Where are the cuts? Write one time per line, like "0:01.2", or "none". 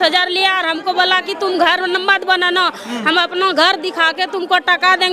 none